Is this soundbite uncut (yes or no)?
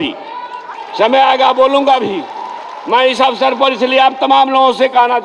yes